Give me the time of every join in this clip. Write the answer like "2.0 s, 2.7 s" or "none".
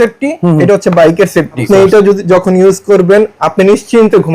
1.6 s